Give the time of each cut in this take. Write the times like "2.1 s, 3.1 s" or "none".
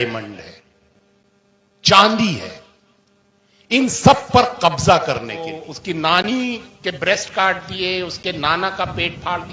5.7 s